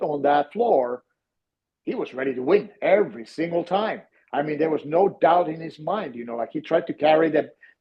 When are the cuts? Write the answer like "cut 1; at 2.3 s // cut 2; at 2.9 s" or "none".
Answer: none

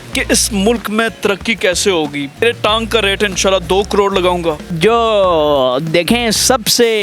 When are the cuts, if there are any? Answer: cut 1; at 2.4 s // cut 2; at 4.7 s

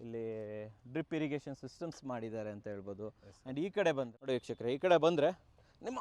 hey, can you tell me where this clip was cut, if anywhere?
cut 1; at 4.2 s

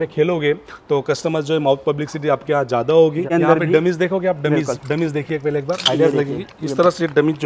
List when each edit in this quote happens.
cut 1; at 3.3 s

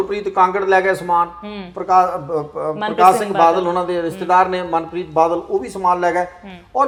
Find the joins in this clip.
none

